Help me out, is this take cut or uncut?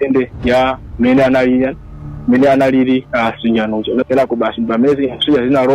cut